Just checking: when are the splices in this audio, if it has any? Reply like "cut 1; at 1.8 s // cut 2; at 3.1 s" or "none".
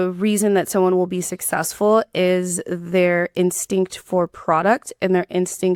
none